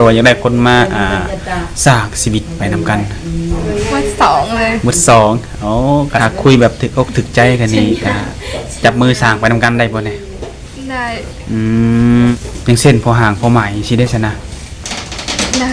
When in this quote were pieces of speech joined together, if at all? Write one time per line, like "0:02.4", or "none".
0:06.2
0:12.4